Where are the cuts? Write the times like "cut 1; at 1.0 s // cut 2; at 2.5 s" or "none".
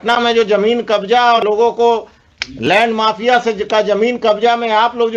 cut 1; at 1.4 s